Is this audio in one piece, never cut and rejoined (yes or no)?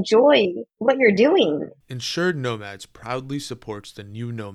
no